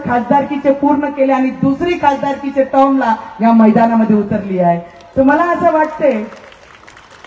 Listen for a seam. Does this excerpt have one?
no; 0 cuts

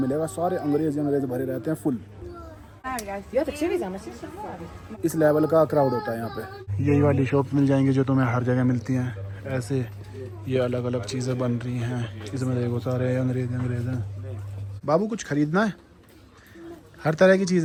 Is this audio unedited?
yes; 0 cuts

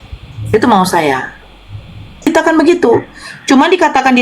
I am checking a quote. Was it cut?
yes; 1 cut; at 2.3 s

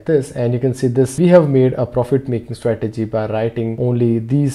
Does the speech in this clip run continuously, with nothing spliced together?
no; 2 cuts; at 1.1 s, 3.7 s

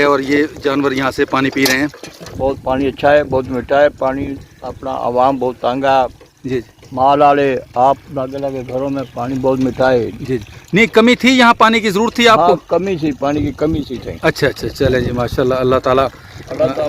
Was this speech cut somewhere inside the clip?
yes; 1 cut; at 2.3 s

